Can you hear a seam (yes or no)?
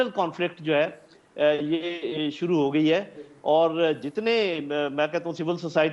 no